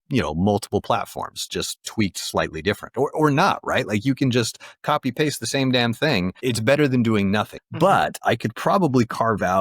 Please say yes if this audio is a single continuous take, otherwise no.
no